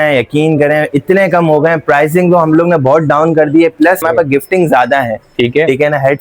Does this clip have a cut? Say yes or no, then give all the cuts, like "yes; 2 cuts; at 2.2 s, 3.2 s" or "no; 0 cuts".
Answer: yes; 1 cut; at 4.0 s